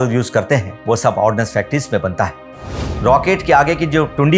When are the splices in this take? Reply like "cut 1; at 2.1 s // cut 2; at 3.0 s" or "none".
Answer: cut 1; at 2.8 s